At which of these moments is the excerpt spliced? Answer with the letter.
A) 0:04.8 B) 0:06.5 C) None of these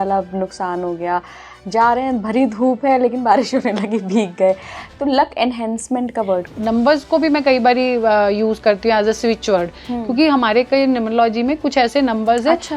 B